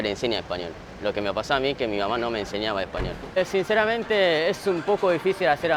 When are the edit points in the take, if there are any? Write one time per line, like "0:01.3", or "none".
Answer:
0:03.4